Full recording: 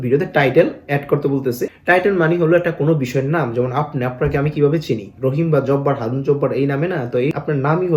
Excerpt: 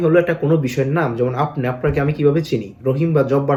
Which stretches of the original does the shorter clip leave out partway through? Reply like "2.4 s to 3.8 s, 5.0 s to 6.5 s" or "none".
none

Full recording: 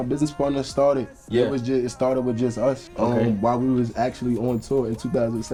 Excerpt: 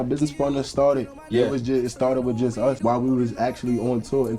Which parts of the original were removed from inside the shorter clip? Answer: 2.8 s to 3.4 s

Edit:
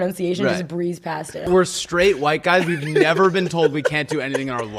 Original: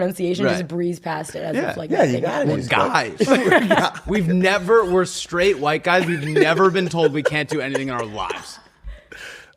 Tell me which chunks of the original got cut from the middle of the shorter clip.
1.5 s to 4.9 s

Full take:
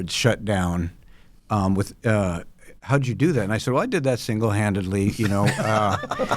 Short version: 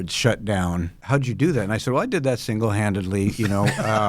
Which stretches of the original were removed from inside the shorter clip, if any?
0.9 s to 2.7 s

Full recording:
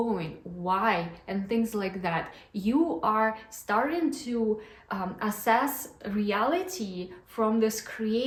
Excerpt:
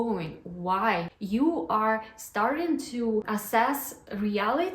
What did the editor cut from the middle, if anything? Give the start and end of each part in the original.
1.1 s to 2.5 s, 4.6 s to 5.2 s

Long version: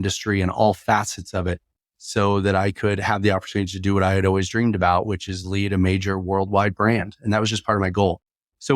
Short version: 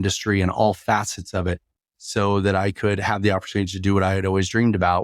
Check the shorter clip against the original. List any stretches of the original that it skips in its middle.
none

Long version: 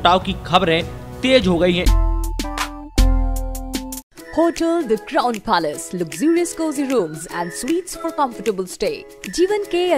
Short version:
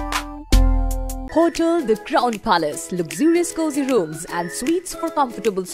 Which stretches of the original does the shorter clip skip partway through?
3.6 s to 4.2 s

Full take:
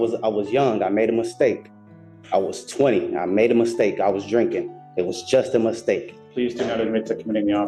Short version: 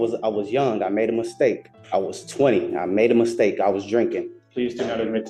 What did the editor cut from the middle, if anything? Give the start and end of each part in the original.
1.7 s to 2.1 s, 4.8 s to 6.2 s

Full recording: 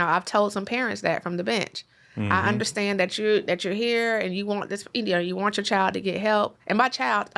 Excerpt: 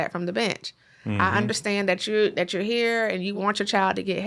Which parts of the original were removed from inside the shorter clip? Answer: 4.5 s to 5.3 s

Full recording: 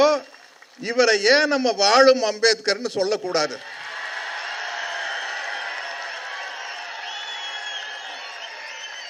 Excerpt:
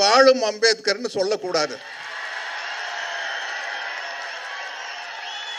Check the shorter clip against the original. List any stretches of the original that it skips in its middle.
none

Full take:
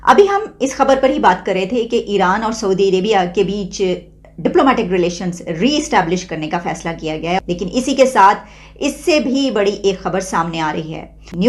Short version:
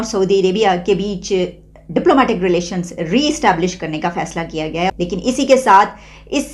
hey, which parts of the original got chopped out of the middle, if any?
none

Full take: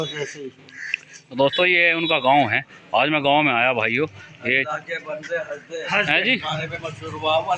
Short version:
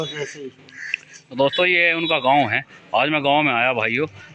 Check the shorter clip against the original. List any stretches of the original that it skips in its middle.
none

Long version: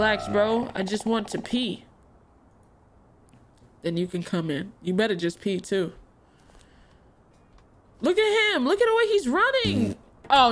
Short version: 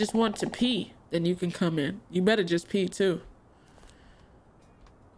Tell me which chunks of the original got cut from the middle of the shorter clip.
1.9 s to 3.7 s

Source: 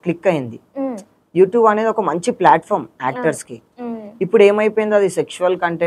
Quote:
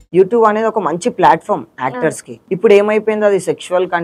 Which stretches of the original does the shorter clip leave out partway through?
3.5 s to 4.0 s

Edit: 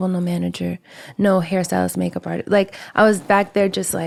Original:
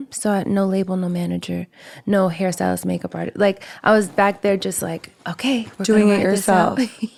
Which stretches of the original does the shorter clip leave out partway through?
none

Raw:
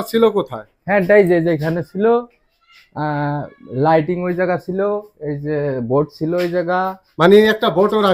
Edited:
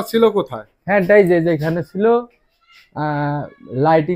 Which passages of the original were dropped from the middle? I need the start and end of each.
none

